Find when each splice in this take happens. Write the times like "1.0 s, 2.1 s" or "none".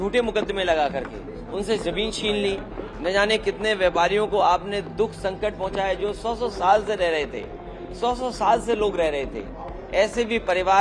none